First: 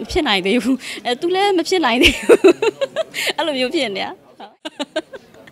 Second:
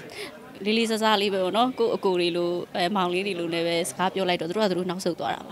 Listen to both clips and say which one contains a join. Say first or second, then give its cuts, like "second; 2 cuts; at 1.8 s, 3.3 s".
first; 1 cut; at 4.2 s